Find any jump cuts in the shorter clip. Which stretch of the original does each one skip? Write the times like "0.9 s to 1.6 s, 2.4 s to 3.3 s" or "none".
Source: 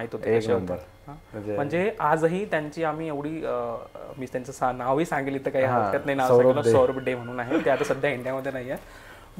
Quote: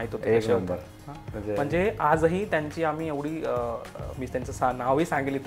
none